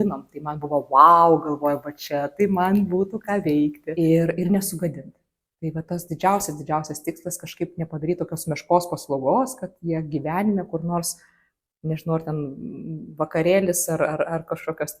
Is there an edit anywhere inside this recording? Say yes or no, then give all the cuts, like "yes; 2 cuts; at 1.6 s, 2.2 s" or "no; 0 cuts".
yes; 1 cut; at 3.8 s